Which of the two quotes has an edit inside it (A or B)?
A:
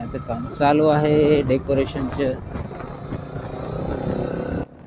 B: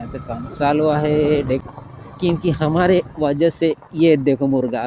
B